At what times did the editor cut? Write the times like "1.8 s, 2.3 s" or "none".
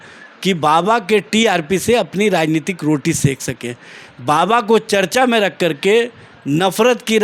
none